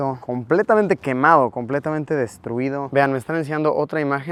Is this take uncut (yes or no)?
yes